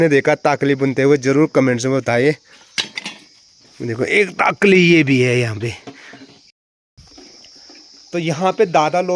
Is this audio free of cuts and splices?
yes; 0 cuts

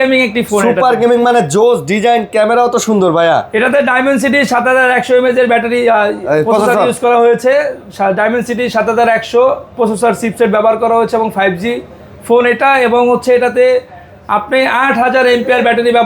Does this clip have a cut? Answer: no; 0 cuts

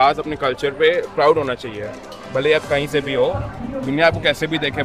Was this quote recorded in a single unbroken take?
yes; 0 cuts

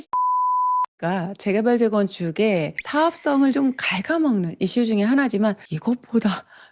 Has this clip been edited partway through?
no; 0 cuts

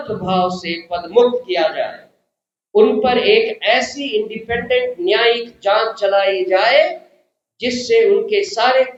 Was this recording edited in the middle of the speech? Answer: no; 0 cuts

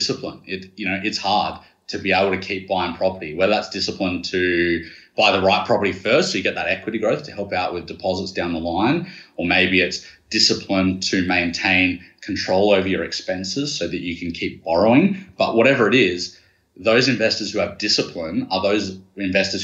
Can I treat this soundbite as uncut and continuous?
yes; 0 cuts

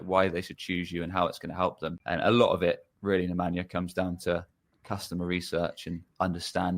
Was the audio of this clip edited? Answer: yes; 1 cut; at 1.9 s

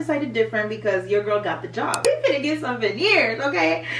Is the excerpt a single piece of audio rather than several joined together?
no; 1 cut; at 2.0 s

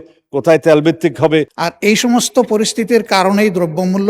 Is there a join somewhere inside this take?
yes; 1 cut; at 1.6 s

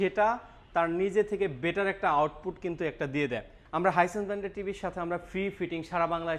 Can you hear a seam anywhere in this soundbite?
yes; 1 cut; at 3.6 s

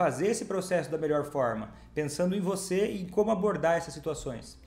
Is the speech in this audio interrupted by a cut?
no; 0 cuts

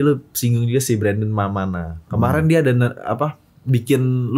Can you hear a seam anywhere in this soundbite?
no; 0 cuts

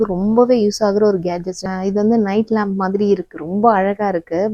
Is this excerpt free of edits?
no; 1 cut; at 1.6 s

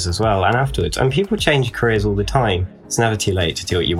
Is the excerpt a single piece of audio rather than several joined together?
no; 1 cut; at 3.0 s

